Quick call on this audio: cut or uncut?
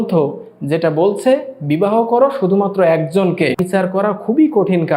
cut